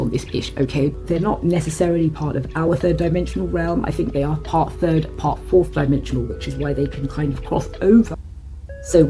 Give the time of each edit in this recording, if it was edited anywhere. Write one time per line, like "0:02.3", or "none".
0:01.0
0:08.2